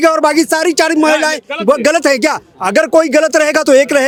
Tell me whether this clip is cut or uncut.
uncut